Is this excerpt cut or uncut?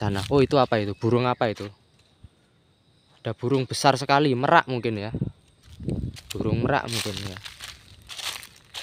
uncut